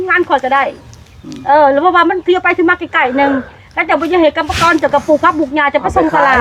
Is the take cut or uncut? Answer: uncut